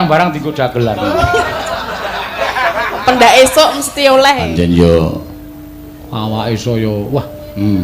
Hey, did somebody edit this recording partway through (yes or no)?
yes